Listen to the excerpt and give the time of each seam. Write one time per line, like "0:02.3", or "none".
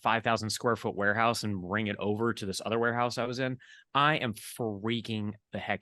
none